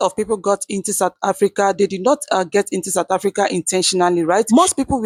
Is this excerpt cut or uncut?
uncut